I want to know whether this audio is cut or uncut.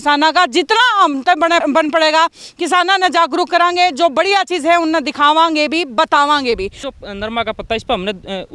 cut